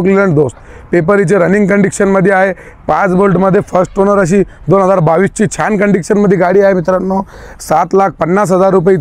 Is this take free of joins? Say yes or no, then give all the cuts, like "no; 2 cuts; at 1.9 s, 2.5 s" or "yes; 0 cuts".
yes; 0 cuts